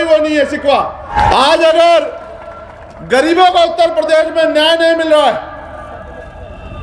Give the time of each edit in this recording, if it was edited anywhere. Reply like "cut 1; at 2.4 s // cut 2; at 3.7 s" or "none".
cut 1; at 1.1 s